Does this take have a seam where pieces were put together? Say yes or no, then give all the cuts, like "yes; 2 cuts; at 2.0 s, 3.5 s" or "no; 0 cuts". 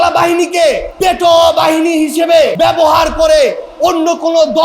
yes; 2 cuts; at 0.9 s, 2.5 s